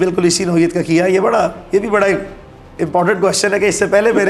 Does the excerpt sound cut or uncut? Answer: uncut